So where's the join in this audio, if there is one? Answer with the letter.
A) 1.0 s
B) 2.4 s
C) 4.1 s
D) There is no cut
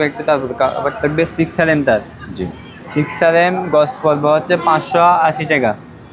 D